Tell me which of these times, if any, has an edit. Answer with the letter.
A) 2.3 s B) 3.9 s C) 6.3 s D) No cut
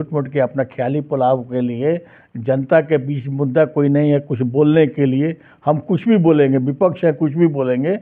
D